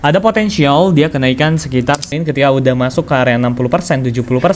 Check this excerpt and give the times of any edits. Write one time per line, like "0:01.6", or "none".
0:02.1